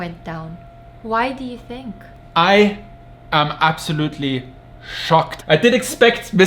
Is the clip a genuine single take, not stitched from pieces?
no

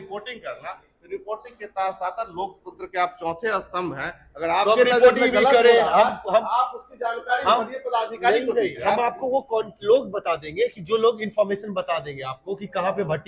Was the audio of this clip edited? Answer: no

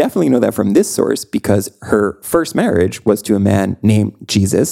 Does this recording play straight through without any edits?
yes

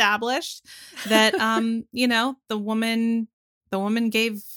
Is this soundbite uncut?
yes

